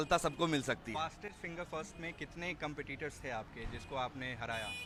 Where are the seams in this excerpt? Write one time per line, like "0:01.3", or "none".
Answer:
none